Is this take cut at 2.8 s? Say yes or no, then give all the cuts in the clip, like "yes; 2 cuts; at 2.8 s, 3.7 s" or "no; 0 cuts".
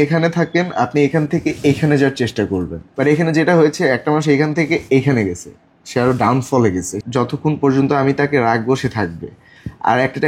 yes; 2 cuts; at 2.8 s, 6.9 s